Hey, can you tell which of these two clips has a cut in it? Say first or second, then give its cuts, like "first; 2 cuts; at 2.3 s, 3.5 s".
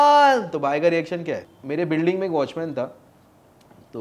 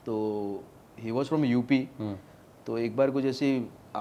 first; 1 cut; at 1.5 s